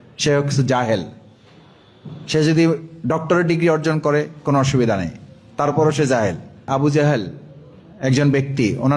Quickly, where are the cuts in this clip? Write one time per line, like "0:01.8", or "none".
0:06.7